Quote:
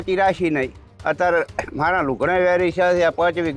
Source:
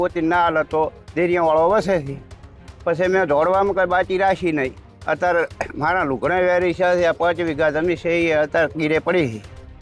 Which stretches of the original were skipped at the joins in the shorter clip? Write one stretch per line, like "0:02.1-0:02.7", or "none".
none